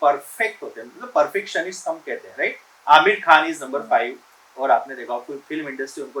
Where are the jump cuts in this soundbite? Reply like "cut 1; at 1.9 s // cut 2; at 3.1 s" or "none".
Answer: none